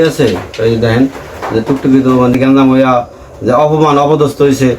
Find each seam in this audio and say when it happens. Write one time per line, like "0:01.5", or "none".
0:02.3